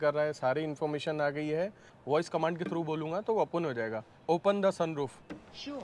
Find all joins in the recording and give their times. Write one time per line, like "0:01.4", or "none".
0:01.9